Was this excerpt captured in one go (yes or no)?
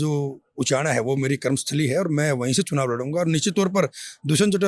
yes